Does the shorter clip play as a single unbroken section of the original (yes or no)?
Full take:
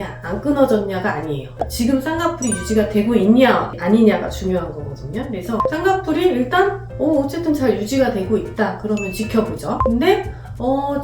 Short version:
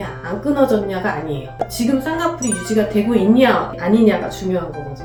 yes